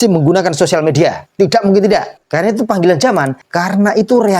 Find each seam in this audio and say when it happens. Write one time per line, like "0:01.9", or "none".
0:01.2
0:02.2
0:03.4